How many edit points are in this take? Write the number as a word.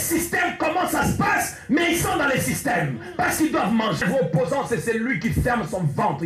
one